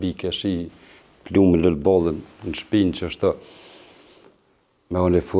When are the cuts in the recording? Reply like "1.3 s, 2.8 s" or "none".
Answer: none